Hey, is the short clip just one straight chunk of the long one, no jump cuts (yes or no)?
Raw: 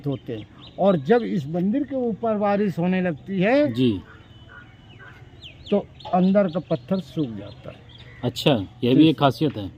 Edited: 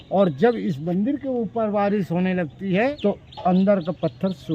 no